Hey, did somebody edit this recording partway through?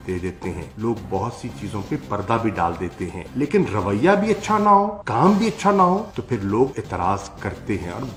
no; 0 cuts

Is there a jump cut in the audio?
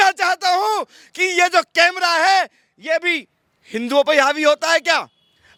no; 0 cuts

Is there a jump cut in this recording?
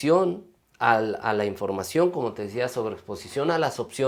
no; 0 cuts

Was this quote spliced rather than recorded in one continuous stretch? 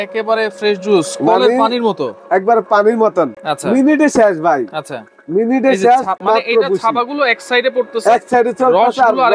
no; 0 cuts

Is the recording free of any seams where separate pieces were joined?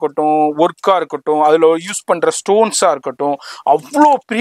yes; 0 cuts

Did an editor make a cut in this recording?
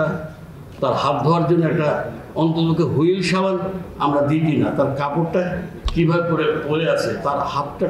no; 0 cuts

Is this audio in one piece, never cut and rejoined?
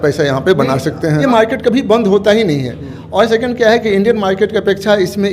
no; 1 cut; at 1.2 s

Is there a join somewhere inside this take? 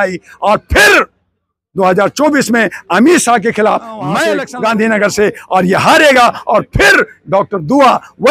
yes; 1 cut; at 4.5 s

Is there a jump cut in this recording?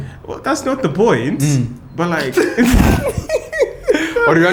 no; 0 cuts

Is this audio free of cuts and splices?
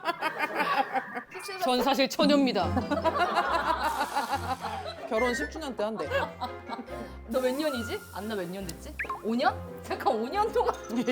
no; 1 cut; at 5.0 s

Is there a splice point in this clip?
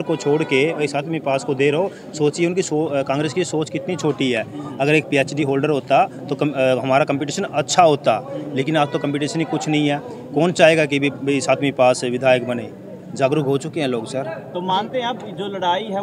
no; 0 cuts

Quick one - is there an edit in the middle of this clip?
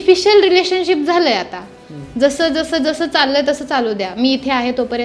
no; 0 cuts

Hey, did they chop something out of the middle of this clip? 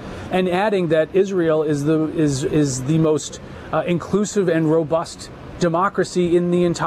no; 0 cuts

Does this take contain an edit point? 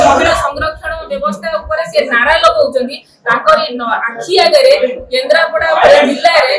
no; 0 cuts

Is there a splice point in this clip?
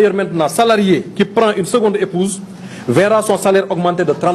no; 0 cuts

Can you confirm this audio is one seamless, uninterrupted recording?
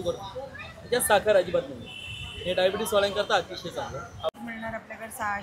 no; 1 cut; at 4.3 s

